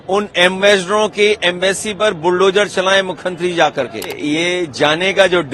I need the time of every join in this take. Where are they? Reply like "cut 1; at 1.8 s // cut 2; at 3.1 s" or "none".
cut 1; at 4.1 s